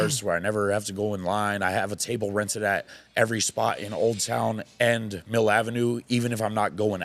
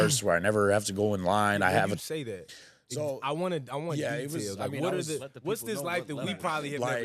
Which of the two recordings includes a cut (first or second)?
second